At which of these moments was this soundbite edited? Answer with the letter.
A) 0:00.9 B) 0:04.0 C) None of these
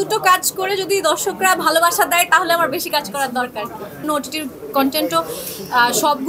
B